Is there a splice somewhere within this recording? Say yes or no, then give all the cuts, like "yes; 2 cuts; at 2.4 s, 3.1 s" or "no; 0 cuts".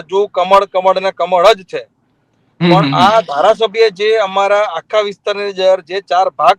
no; 0 cuts